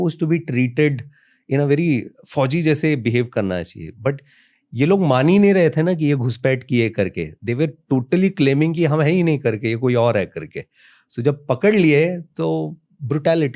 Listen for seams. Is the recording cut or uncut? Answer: uncut